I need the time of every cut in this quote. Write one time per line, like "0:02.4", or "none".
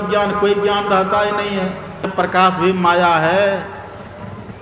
0:02.1